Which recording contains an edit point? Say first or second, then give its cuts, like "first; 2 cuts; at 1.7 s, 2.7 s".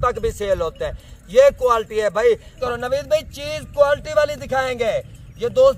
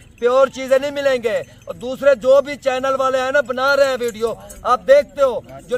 first; 1 cut; at 2.6 s